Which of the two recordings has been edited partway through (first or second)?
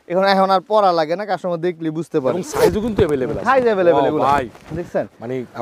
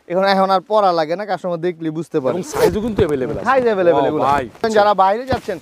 second